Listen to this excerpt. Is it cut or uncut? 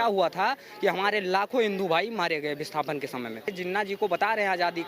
cut